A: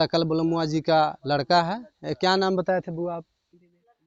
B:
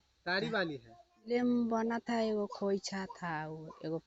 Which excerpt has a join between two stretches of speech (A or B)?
B